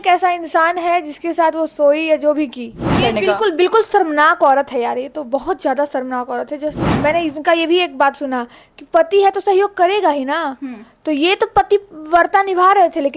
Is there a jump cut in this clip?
yes; 2 cuts; at 3.0 s, 6.8 s

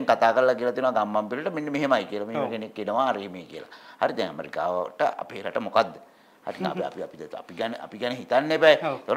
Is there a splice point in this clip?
no; 0 cuts

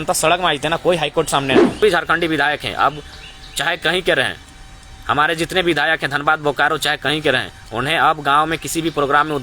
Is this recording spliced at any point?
yes; 1 cut; at 1.8 s

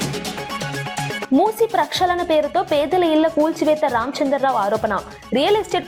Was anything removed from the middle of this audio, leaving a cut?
no; 0 cuts

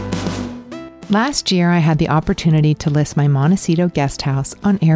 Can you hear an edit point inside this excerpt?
yes; 1 cut; at 0.9 s

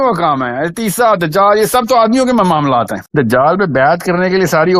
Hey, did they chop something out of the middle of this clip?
no; 0 cuts

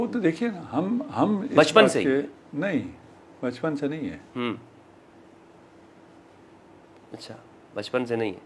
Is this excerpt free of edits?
yes; 0 cuts

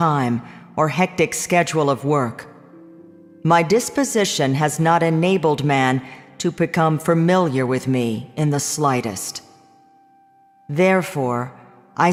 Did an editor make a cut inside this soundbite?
no; 0 cuts

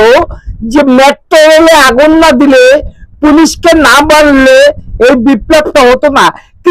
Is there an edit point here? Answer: no; 0 cuts

